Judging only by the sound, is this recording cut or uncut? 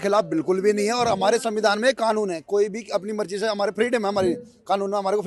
uncut